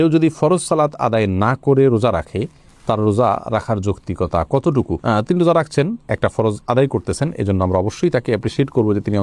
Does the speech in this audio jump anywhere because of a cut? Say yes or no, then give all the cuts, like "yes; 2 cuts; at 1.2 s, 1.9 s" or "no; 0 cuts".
no; 0 cuts